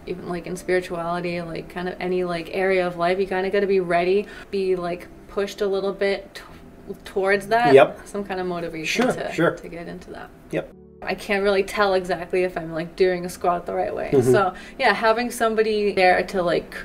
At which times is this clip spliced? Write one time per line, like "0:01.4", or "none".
0:04.4
0:11.1
0:15.9